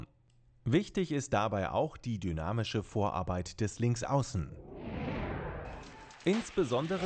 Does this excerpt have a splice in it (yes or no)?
yes